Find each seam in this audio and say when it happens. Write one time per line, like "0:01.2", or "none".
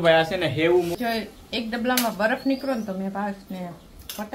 0:00.9